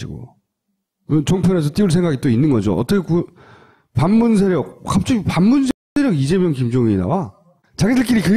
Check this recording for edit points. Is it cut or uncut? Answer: cut